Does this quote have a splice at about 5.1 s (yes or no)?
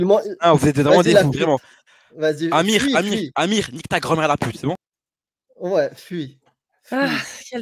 no